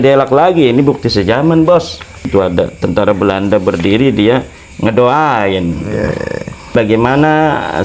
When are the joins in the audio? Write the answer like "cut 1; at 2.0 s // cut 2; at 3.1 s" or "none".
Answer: cut 1; at 2.3 s // cut 2; at 6.7 s